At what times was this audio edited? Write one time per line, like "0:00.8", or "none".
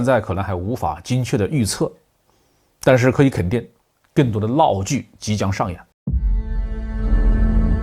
0:05.9